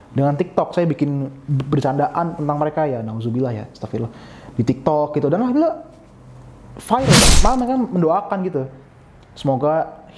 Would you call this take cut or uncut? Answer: cut